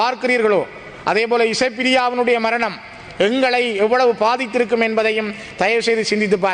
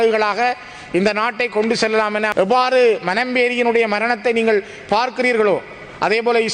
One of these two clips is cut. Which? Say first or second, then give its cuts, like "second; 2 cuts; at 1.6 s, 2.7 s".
second; 1 cut; at 2.3 s